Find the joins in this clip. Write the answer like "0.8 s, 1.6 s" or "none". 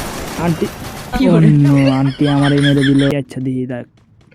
3.1 s

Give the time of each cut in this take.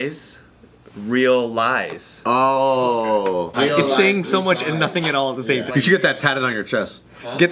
3.5 s, 5.7 s

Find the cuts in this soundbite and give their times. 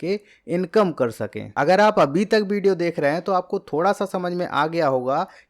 none

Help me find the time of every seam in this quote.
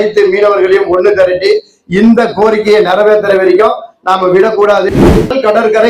4.9 s

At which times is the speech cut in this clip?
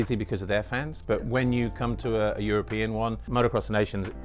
3.2 s

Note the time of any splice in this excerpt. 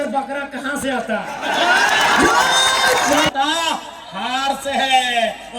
3.3 s

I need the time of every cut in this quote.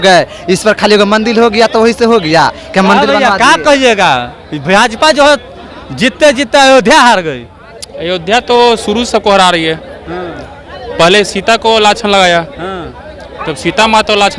none

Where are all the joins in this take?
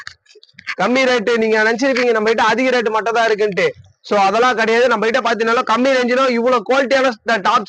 none

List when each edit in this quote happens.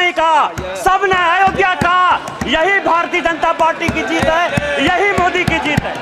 none

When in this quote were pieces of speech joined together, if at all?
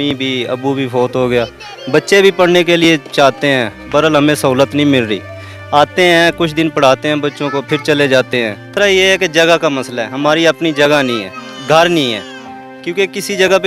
8.7 s

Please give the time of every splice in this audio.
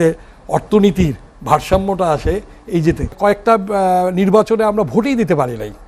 3.1 s

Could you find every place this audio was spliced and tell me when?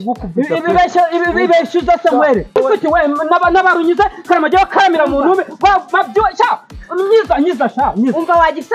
2.6 s

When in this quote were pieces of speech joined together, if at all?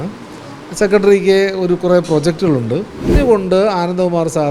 3.2 s

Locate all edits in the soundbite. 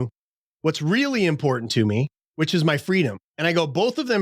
2.2 s, 3.3 s

